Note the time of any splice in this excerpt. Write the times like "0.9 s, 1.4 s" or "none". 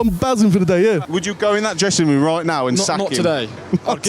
1.0 s